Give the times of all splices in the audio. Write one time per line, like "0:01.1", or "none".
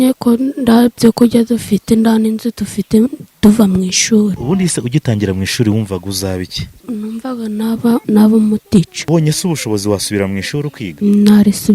0:04.4
0:06.8
0:08.0
0:09.0
0:10.8